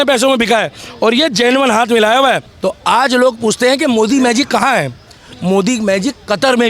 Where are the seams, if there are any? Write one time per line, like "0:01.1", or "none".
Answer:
0:02.5